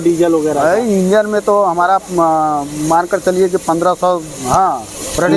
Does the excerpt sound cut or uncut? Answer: uncut